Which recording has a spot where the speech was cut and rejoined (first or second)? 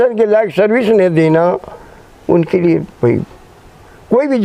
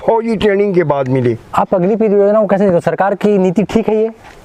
second